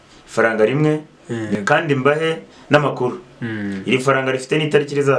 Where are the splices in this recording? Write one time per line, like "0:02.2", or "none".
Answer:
0:01.5